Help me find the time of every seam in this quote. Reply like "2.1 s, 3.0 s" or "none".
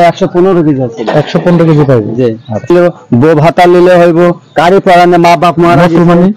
2.7 s